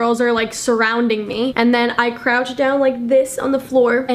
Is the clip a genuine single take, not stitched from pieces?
yes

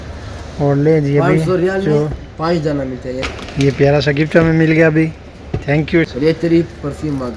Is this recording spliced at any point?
yes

